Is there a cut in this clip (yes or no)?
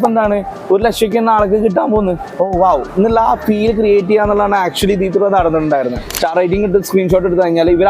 yes